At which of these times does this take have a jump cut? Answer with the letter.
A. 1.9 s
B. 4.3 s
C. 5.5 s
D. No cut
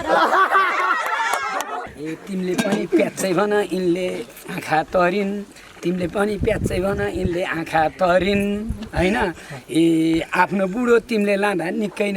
A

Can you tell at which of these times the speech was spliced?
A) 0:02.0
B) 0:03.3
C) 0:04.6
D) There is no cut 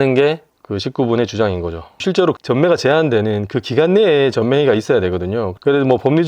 A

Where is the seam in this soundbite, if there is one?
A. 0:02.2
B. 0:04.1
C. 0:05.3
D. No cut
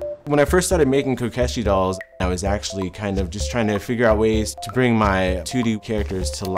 A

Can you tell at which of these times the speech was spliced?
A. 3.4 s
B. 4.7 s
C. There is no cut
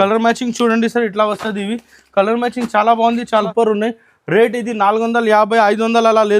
A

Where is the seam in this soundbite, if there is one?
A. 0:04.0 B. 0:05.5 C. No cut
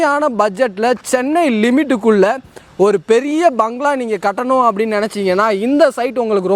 C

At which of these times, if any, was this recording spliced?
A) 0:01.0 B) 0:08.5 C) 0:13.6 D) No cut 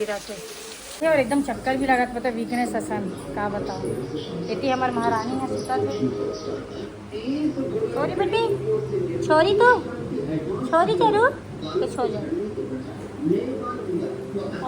A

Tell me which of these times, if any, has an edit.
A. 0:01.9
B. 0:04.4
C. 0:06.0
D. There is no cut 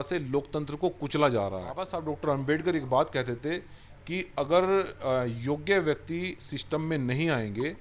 A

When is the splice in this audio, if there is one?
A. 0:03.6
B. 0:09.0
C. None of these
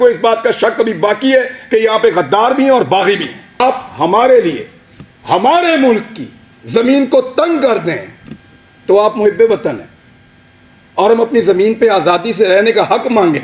A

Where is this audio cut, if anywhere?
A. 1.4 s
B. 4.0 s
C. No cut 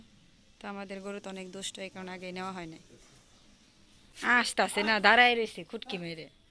B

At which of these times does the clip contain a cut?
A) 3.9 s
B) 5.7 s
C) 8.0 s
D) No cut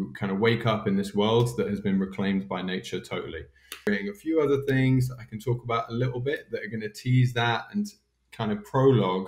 A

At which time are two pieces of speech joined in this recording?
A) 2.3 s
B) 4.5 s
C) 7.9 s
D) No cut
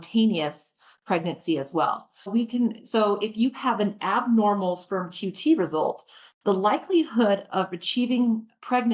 A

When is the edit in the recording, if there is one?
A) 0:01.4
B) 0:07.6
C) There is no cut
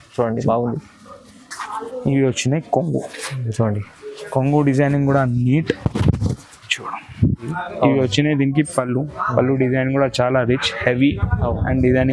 B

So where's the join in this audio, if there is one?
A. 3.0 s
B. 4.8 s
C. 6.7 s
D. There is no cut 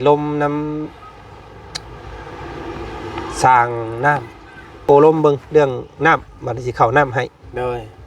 B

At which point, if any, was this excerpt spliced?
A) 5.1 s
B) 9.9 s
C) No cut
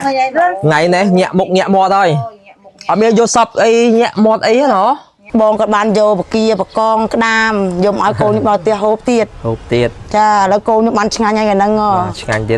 A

